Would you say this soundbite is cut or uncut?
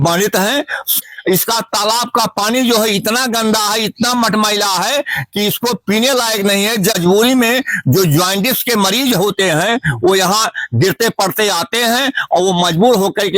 cut